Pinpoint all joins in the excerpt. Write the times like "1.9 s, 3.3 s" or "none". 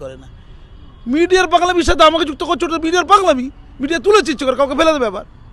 none

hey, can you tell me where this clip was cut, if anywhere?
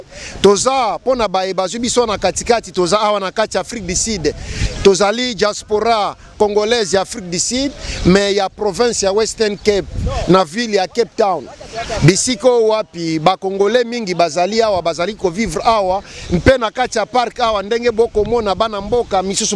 none

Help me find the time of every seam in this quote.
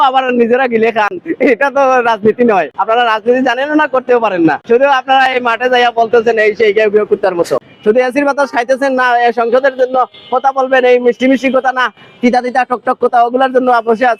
2.7 s, 4.6 s, 7.7 s

